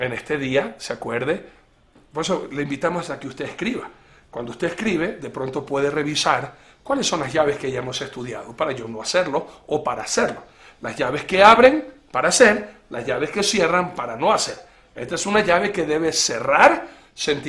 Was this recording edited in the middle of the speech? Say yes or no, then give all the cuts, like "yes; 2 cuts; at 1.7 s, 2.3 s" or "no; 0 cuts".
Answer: no; 0 cuts